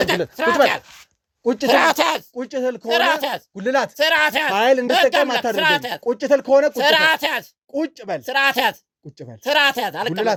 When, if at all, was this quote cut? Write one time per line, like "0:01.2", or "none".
none